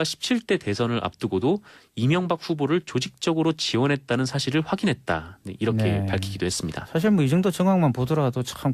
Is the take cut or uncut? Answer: cut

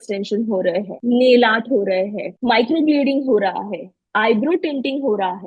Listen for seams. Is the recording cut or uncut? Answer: cut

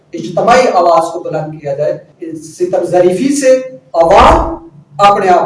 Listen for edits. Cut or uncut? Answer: cut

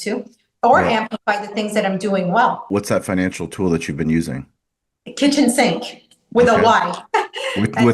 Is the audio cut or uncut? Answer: cut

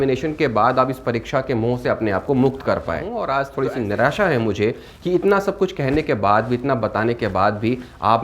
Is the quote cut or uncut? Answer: cut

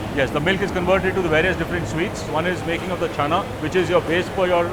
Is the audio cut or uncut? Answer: uncut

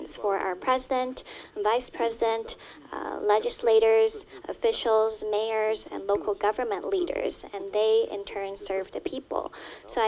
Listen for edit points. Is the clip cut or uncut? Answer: uncut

